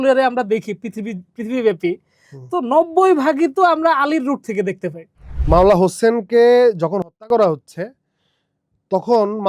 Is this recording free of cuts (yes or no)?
no